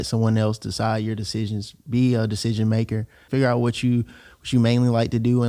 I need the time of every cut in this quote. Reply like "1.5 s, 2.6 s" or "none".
3.2 s